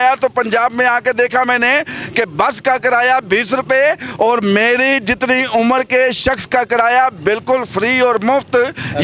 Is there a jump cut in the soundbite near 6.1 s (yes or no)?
no